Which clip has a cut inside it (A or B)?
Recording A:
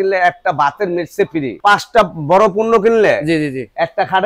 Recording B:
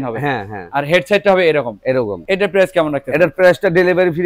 A